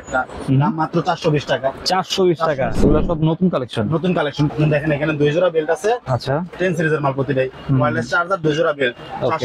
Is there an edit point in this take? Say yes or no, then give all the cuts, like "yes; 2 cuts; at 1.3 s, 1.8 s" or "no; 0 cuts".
yes; 3 cuts; at 2.7 s, 4.5 s, 6.5 s